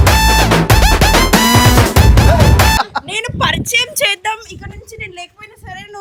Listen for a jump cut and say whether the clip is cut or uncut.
uncut